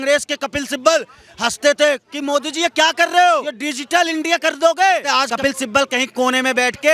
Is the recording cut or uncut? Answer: cut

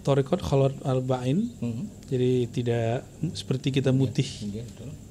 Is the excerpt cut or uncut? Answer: uncut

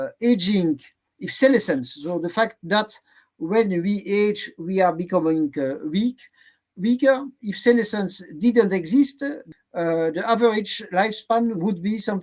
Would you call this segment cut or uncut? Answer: cut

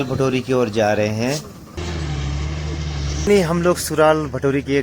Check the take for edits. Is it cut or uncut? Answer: cut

